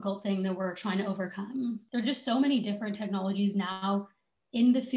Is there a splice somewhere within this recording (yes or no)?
yes